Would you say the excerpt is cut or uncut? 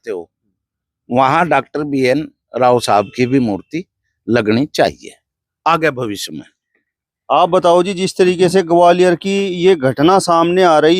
uncut